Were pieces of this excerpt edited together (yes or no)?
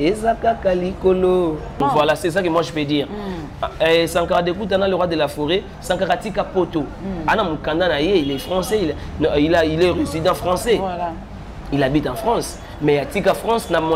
yes